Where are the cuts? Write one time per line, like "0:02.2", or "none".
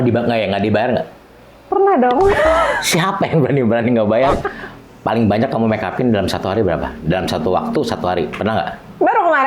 0:04.5